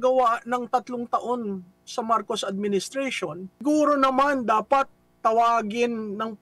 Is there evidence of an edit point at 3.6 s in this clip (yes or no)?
yes